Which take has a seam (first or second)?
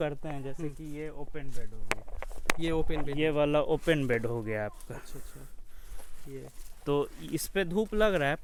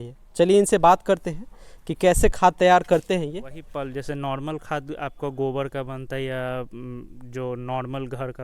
second